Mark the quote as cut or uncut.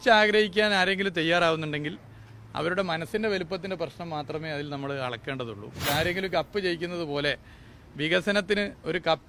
cut